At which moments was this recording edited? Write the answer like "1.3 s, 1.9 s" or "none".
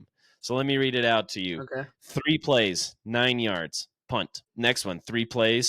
4.4 s